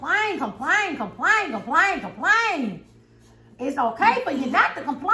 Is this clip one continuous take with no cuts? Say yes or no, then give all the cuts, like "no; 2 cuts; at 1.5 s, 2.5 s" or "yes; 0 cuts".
yes; 0 cuts